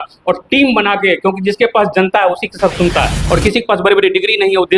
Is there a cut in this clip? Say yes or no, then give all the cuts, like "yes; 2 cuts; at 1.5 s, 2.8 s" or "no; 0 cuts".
yes; 1 cut; at 3.2 s